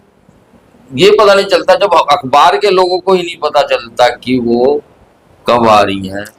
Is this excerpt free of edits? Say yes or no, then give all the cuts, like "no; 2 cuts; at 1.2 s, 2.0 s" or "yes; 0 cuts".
yes; 0 cuts